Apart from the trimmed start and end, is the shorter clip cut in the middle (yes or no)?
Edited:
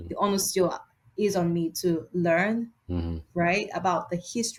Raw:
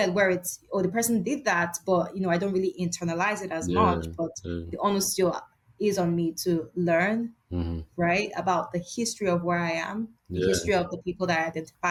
no